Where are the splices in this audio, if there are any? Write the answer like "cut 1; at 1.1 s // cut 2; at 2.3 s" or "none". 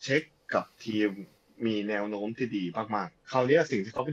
cut 1; at 3.2 s